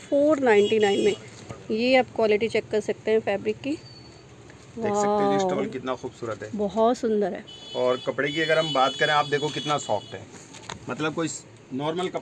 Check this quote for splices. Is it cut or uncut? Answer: uncut